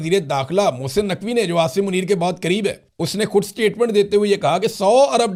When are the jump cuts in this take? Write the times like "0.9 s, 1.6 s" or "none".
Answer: none